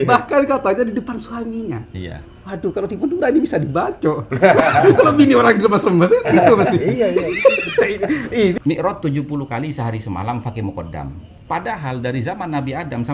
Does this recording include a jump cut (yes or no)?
yes